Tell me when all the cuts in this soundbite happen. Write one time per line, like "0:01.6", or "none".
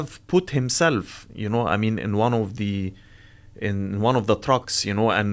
none